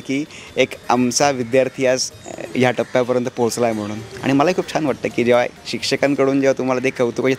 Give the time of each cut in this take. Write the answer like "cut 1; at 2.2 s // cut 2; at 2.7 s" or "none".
none